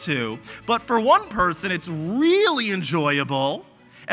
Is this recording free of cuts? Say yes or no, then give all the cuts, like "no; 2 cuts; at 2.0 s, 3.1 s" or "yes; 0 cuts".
yes; 0 cuts